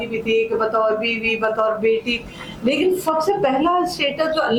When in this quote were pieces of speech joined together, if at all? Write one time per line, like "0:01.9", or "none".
none